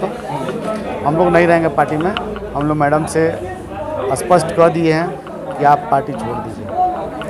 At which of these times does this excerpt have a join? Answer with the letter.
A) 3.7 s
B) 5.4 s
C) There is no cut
C